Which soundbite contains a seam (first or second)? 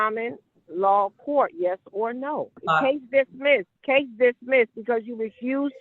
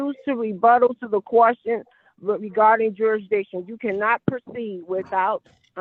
first